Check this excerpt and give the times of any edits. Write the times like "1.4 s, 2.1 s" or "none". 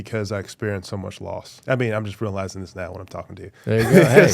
1.5 s

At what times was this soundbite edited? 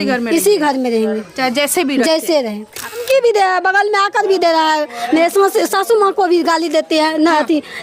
3.0 s

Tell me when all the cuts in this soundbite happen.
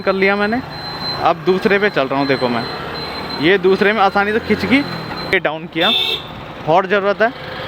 5.3 s

